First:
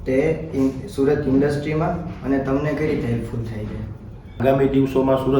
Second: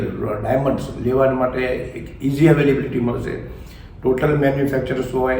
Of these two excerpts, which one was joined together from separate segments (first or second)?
first